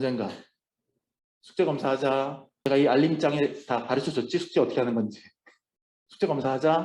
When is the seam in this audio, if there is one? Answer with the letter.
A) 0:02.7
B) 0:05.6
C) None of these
A